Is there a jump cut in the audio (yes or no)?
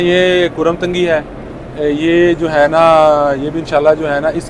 no